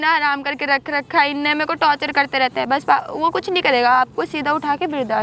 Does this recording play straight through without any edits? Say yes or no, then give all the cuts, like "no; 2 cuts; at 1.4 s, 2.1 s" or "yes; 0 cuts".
yes; 0 cuts